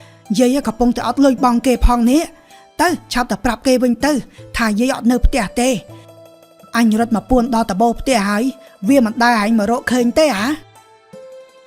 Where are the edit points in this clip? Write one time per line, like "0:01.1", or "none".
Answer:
0:06.0